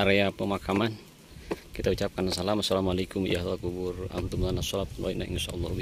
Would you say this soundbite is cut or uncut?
uncut